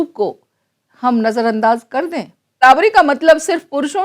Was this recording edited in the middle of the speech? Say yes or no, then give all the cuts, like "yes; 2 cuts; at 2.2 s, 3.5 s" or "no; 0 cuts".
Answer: yes; 1 cut; at 2.6 s